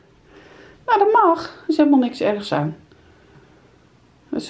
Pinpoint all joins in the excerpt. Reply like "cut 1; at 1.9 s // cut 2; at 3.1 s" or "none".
none